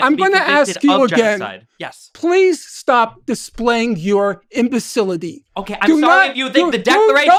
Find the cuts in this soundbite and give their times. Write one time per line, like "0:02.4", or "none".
none